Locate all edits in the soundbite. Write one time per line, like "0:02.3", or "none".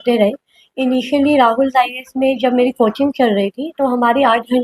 none